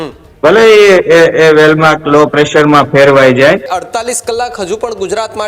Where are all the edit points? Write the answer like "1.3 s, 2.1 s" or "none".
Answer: 3.7 s